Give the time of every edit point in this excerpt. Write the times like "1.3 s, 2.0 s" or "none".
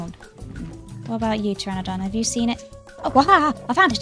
2.9 s